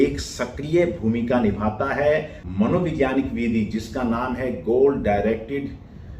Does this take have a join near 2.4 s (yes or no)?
yes